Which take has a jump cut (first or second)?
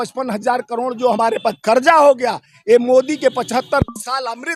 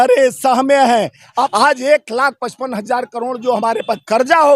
second